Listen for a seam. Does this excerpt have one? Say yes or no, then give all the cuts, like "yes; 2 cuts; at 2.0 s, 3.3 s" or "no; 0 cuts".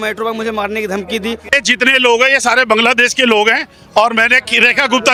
no; 0 cuts